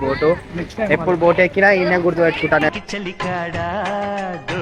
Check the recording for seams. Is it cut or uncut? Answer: cut